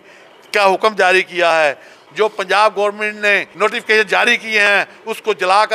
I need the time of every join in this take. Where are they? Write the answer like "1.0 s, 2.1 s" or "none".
2.0 s, 3.5 s